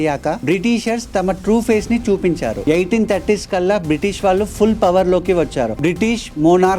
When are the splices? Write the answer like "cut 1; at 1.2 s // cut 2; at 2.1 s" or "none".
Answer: cut 1; at 5.7 s

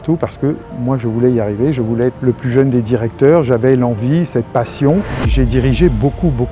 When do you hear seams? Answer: cut 1; at 2.2 s // cut 2; at 5.3 s

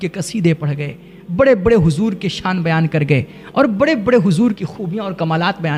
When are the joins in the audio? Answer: none

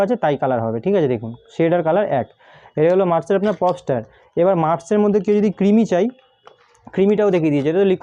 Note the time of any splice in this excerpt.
none

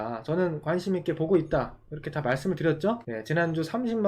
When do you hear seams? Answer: cut 1; at 3.1 s

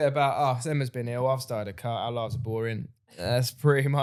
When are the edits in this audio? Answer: none

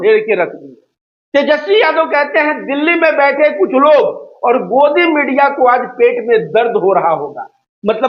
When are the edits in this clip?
none

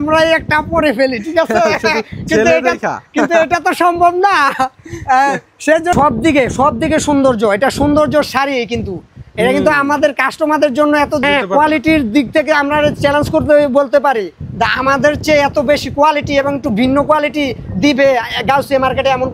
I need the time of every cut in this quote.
cut 1; at 5.9 s // cut 2; at 11.2 s

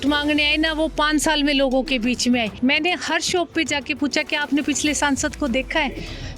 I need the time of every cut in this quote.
cut 1; at 2.5 s

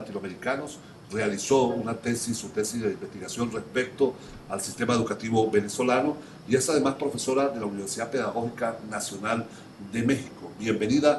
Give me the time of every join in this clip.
cut 1; at 6.8 s

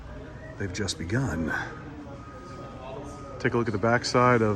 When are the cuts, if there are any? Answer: none

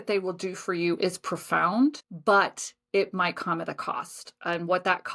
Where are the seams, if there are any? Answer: cut 1; at 2.1 s

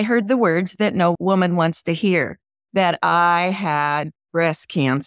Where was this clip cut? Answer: cut 1; at 1.1 s

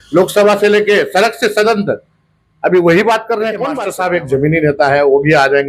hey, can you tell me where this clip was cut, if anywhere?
cut 1; at 3.8 s

